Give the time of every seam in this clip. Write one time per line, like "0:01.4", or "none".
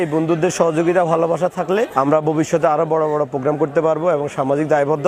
0:01.9